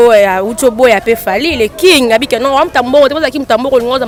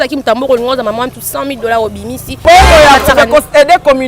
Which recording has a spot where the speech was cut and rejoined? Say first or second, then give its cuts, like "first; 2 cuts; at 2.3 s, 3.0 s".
second; 1 cut; at 2.4 s